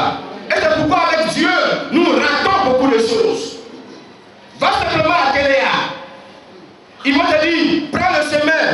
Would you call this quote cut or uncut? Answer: uncut